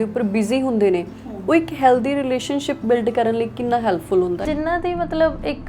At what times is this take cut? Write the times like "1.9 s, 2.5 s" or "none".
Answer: 4.5 s